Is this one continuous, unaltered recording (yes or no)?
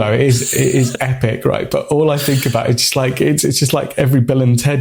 yes